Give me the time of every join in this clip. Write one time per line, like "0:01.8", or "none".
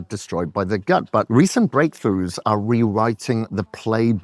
0:01.3